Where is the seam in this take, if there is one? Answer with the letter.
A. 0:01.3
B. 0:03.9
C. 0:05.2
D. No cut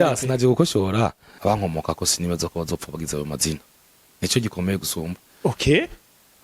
A